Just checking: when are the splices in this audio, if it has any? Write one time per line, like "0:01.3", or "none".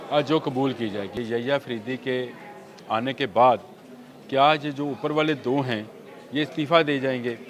0:01.1